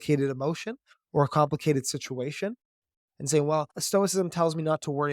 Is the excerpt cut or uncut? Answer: cut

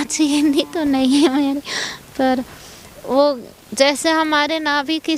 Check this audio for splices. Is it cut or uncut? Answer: uncut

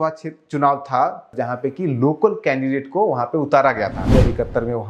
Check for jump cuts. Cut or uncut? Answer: cut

